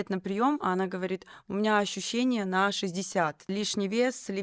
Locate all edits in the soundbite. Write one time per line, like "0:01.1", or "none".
0:03.5